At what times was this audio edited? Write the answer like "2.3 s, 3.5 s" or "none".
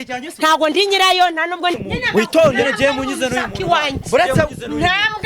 1.8 s